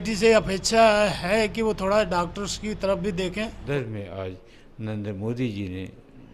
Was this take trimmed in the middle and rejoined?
yes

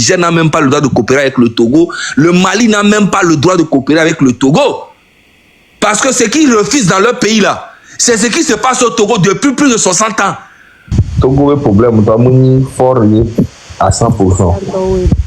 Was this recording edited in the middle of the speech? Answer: yes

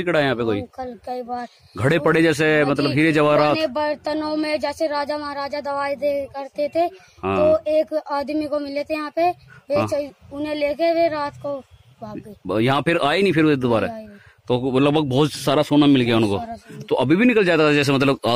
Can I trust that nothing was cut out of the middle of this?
yes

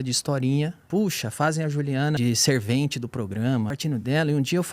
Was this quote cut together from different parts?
yes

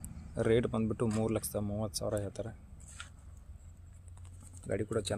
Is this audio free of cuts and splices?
yes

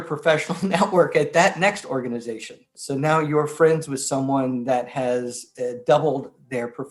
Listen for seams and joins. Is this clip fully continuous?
yes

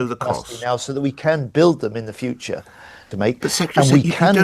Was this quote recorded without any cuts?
no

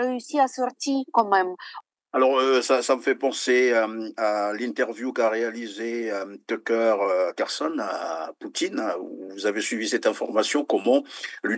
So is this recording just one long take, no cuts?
no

